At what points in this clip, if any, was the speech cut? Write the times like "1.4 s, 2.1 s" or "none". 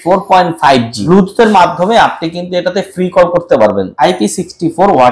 1.0 s, 3.9 s